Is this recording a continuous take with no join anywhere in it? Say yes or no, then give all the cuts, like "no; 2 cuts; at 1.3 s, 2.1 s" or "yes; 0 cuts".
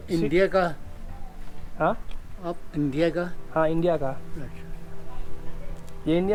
yes; 0 cuts